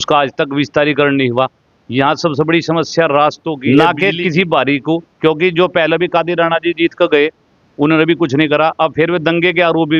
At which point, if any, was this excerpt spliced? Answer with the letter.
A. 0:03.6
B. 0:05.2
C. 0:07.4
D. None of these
A